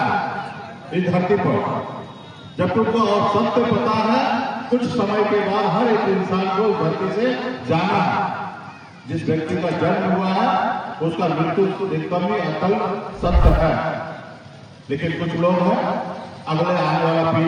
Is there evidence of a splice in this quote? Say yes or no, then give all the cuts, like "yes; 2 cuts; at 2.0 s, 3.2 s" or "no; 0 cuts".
no; 0 cuts